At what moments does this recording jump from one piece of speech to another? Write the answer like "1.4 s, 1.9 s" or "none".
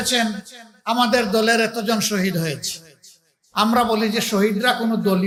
none